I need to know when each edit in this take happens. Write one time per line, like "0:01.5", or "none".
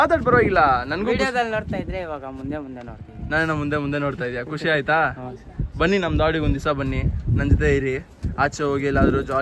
none